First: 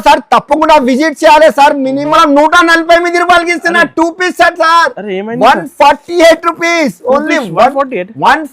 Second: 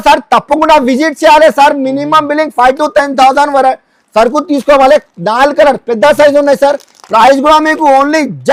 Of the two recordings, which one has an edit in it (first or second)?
first